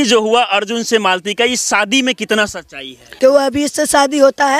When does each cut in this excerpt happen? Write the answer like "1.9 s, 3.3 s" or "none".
3.1 s